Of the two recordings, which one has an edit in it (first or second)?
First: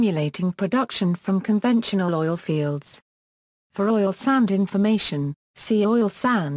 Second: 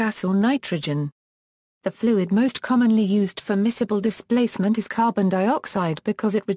second